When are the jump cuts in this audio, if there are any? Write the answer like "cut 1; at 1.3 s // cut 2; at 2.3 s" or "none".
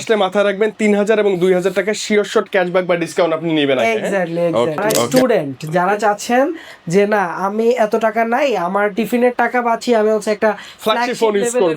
cut 1; at 5.1 s